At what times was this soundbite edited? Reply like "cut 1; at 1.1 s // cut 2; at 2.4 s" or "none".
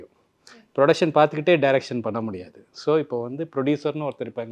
none